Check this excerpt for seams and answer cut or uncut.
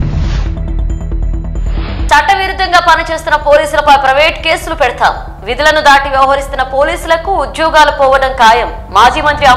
cut